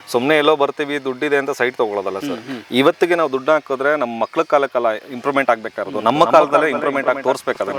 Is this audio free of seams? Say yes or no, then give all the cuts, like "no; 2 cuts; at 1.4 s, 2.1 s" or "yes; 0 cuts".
yes; 0 cuts